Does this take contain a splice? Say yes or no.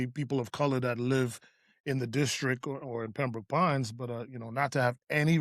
no